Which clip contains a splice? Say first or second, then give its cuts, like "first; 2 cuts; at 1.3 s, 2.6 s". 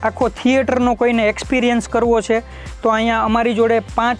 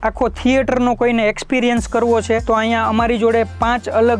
second; 1 cut; at 2.4 s